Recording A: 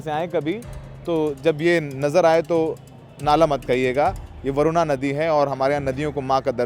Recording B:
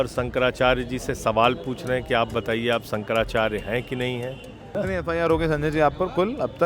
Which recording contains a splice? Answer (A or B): B